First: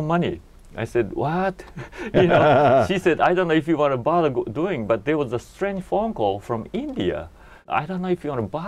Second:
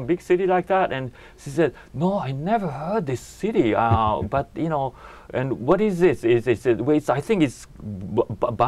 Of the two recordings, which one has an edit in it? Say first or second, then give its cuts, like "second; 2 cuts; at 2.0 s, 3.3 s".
first; 1 cut; at 7.6 s